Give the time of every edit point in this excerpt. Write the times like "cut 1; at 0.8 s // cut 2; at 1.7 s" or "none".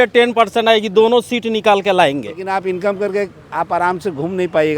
cut 1; at 2.4 s

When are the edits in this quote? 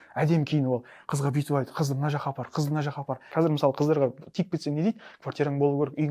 cut 1; at 3.3 s

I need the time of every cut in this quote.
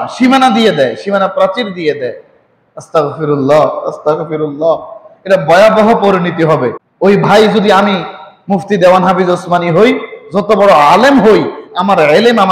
cut 1; at 6.8 s

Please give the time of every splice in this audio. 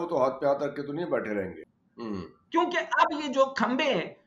cut 1; at 1.6 s

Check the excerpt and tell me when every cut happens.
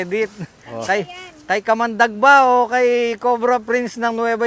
none

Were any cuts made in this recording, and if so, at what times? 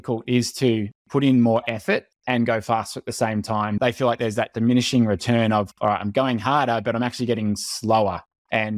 cut 1; at 3.8 s

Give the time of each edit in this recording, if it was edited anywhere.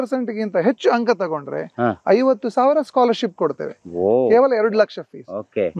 none

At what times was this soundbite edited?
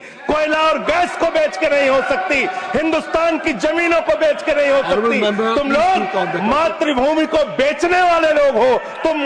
none

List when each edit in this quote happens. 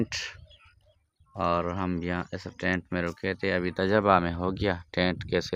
none

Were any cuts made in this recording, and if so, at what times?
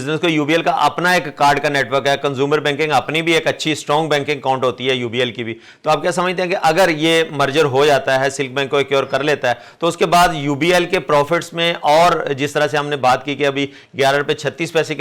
none

